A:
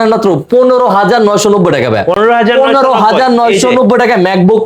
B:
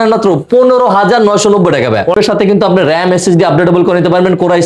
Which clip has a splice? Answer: B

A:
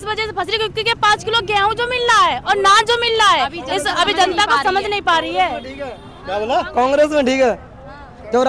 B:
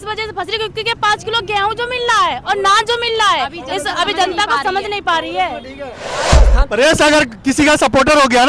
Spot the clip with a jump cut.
B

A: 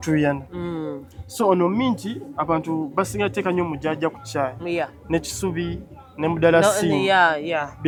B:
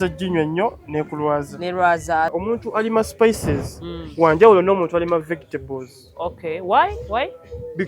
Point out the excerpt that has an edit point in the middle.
B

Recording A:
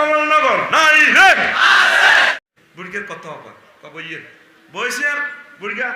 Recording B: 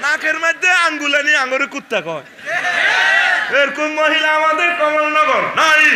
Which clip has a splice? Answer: A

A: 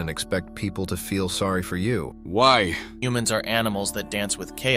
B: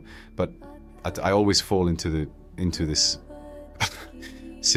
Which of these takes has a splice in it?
A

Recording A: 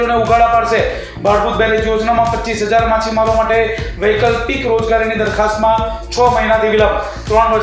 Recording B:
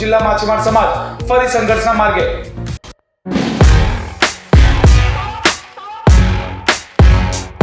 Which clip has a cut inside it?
B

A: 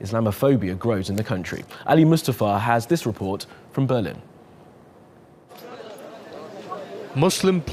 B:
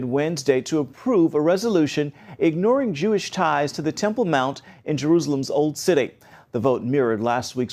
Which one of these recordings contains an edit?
A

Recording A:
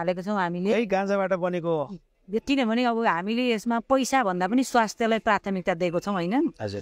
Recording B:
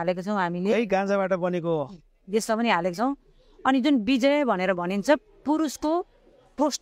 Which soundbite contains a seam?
A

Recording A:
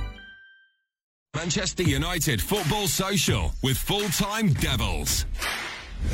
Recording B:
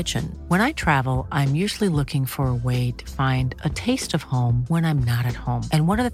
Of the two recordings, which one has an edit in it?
A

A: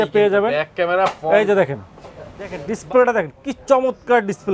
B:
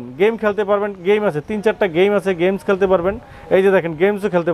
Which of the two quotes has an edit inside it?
A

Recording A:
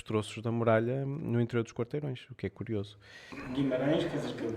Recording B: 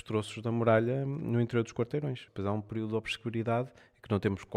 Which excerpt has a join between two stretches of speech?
B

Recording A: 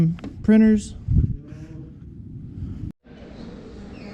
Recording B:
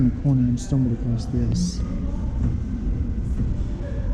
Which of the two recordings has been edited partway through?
A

